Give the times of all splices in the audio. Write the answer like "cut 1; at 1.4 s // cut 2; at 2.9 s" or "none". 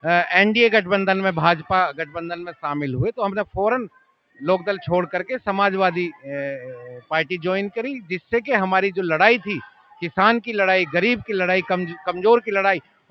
none